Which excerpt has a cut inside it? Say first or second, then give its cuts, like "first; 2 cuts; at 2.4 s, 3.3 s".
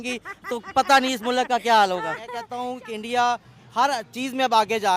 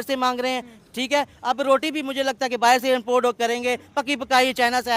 first; 1 cut; at 2.4 s